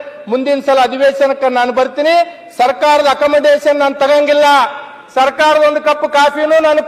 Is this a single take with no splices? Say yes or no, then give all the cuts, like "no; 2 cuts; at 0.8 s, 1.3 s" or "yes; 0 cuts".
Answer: yes; 0 cuts